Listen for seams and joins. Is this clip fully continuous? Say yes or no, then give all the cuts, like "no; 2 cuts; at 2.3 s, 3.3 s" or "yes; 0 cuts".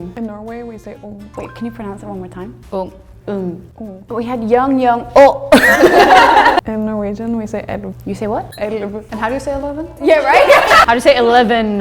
no; 3 cuts; at 1.3 s, 4.0 s, 6.7 s